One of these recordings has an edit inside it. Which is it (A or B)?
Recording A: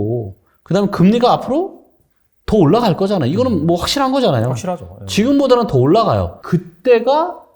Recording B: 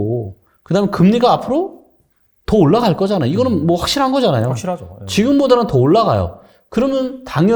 A